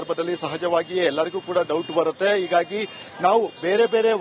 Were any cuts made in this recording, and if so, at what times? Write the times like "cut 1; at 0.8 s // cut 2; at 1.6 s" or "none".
none